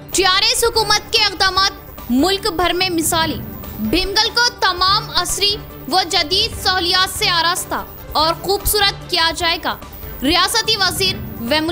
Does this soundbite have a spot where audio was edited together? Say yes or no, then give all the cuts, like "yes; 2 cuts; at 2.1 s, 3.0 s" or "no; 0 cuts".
no; 0 cuts